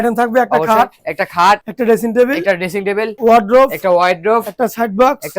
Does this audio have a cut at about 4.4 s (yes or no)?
no